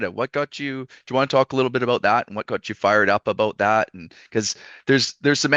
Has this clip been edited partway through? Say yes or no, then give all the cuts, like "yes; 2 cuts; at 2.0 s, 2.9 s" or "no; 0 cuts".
no; 0 cuts